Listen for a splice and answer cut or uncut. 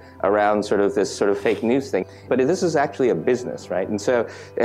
cut